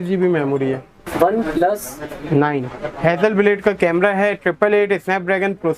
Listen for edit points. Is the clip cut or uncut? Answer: cut